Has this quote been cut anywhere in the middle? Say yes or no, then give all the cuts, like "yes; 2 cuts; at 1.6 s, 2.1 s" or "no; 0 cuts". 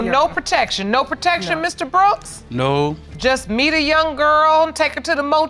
no; 0 cuts